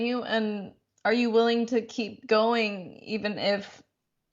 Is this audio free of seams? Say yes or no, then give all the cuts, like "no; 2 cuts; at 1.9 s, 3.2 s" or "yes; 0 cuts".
yes; 0 cuts